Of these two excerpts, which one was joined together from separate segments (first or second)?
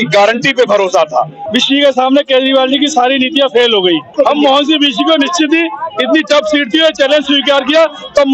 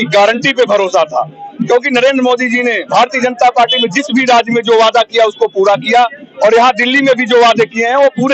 first